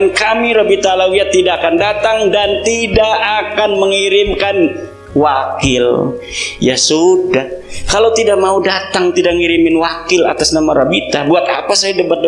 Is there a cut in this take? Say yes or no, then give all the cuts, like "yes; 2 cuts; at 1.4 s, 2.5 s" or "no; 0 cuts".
no; 0 cuts